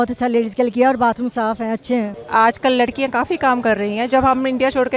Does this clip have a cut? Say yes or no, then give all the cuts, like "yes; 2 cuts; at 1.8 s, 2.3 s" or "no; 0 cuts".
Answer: yes; 1 cut; at 2.1 s